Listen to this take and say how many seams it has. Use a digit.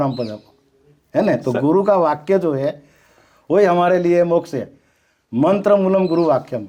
0